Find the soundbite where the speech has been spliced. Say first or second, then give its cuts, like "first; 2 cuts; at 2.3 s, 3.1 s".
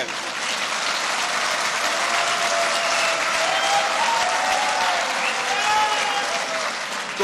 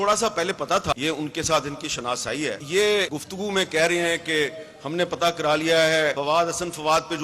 second; 4 cuts; at 0.9 s, 2.6 s, 3.2 s, 6.2 s